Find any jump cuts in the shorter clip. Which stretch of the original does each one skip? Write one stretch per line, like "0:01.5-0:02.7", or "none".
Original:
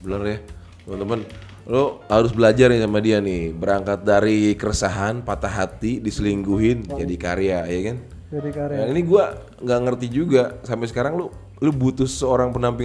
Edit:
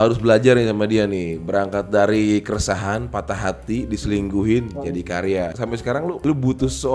0:08.2-0:11.4